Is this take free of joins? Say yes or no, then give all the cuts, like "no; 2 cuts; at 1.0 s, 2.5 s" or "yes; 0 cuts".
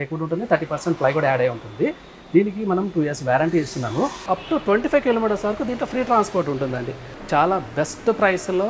no; 2 cuts; at 4.3 s, 7.1 s